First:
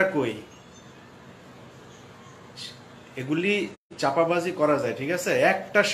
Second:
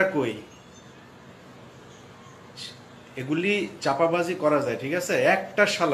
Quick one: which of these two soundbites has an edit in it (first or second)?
second